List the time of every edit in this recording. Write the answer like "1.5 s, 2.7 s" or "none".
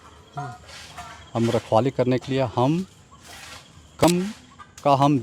4.0 s